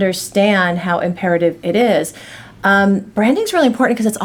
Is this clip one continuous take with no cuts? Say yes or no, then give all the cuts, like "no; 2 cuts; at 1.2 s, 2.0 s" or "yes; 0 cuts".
yes; 0 cuts